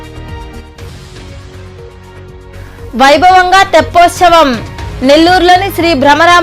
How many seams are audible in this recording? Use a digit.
1